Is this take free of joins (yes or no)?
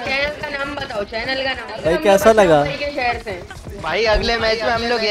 no